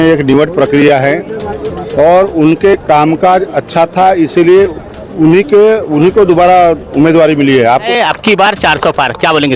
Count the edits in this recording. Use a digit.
1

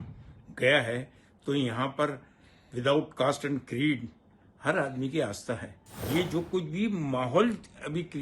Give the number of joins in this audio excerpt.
1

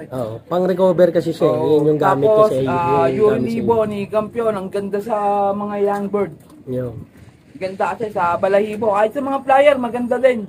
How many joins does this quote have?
0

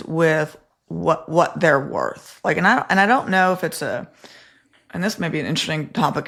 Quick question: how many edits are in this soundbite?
0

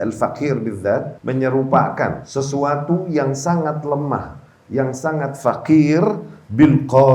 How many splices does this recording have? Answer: 2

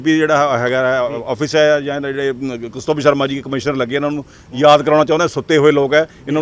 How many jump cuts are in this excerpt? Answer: 0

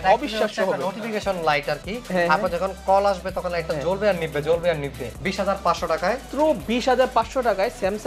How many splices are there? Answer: 2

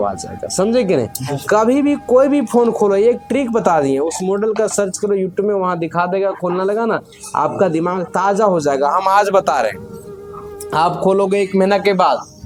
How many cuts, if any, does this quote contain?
0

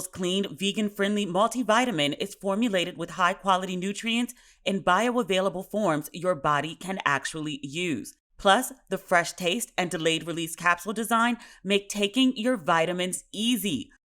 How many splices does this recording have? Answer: 1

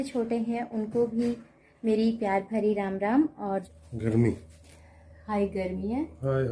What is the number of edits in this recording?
1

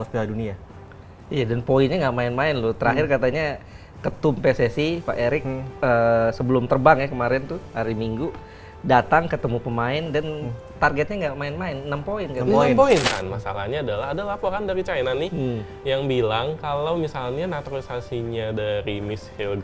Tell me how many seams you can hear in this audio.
1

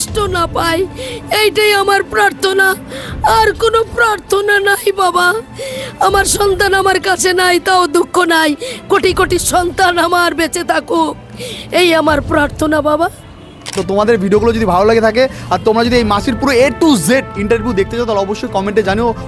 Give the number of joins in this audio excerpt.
0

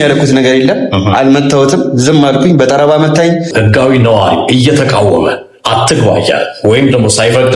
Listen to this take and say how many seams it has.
1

